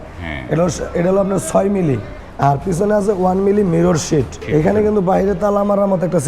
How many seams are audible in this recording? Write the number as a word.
two